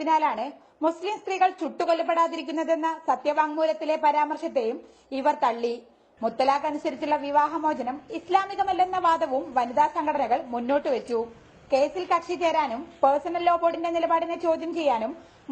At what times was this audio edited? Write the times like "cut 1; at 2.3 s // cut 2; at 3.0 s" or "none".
cut 1; at 1.6 s